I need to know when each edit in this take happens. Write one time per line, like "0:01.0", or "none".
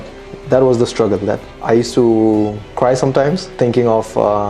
0:01.5
0:02.6
0:03.5